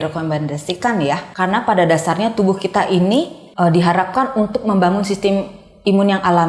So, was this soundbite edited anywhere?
yes; 2 cuts; at 1.3 s, 3.4 s

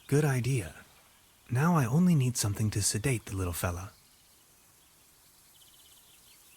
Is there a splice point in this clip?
yes; 2 cuts; at 2.8 s, 4.0 s

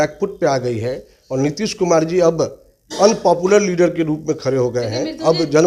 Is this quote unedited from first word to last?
yes; 0 cuts

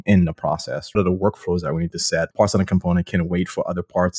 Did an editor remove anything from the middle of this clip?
yes; 2 cuts; at 1.0 s, 2.3 s

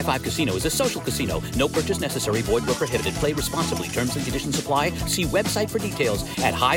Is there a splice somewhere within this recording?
no; 0 cuts

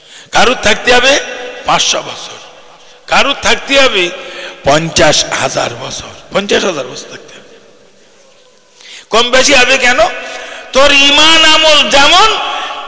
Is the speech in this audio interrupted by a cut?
yes; 1 cut; at 8.5 s

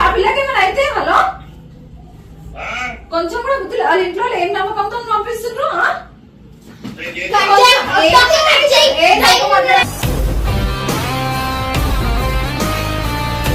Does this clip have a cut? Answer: no; 0 cuts

